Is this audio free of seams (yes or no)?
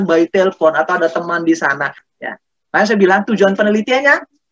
no